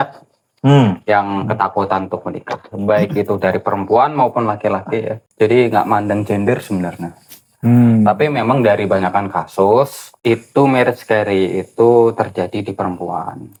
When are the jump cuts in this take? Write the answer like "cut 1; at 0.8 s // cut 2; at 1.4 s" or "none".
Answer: none